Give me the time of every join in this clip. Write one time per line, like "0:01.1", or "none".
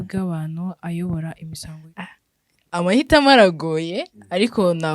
0:01.5